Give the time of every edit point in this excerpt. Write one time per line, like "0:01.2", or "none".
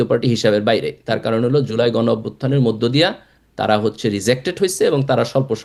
none